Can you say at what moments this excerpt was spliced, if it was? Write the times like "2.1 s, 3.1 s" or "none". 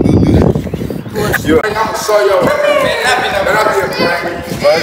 1.6 s